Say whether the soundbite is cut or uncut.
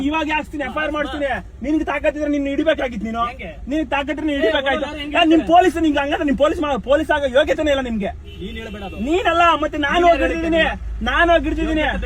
uncut